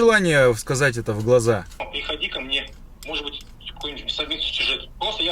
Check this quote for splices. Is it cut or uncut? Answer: cut